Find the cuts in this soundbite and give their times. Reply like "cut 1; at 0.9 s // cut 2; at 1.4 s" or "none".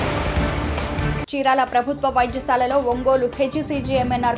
cut 1; at 1.1 s